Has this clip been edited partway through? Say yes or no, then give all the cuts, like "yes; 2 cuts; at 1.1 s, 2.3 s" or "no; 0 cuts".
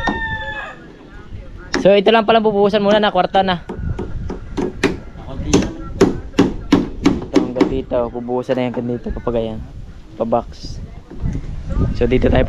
no; 0 cuts